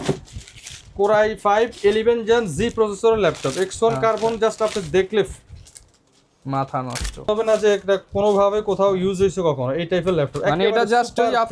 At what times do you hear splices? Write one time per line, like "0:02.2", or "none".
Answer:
0:07.3